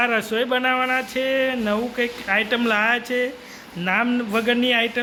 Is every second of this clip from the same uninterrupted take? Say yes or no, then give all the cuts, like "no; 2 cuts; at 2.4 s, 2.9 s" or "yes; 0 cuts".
yes; 0 cuts